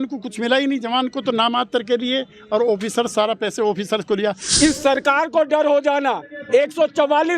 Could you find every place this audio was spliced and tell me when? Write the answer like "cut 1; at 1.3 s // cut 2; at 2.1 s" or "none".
cut 1; at 4.4 s

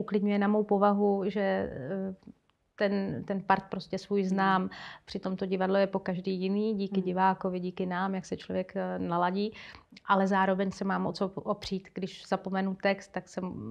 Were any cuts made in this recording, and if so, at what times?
none

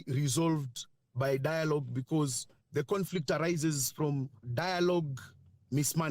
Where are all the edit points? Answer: cut 1; at 4.4 s

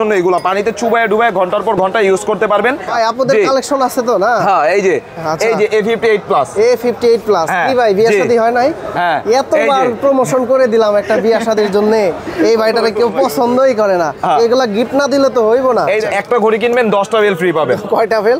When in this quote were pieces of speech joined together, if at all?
cut 1; at 2.9 s // cut 2; at 16.1 s

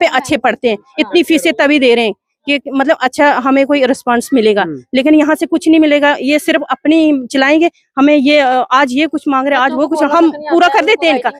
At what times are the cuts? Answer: none

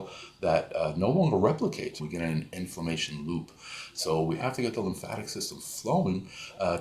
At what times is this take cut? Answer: cut 1; at 2.0 s

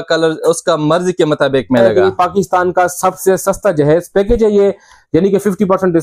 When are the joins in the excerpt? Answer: cut 1; at 1.9 s

